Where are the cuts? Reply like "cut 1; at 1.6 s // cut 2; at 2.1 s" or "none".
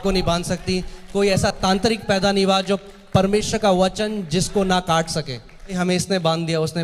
cut 1; at 5.7 s